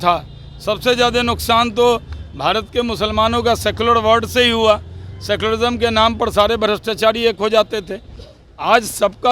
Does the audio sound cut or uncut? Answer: uncut